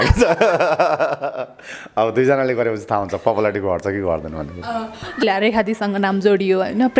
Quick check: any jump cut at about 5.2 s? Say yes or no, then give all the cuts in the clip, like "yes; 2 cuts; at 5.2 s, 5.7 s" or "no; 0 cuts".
yes; 1 cut; at 5.2 s